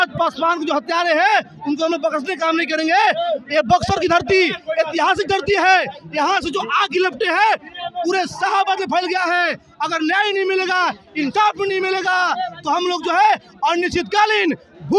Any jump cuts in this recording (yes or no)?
no